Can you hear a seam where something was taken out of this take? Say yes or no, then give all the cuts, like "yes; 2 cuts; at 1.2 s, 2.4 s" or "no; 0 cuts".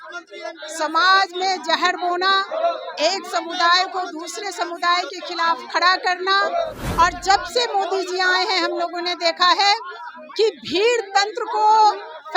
no; 0 cuts